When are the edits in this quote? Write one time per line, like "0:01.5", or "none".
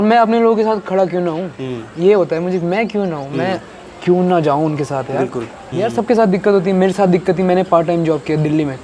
0:05.7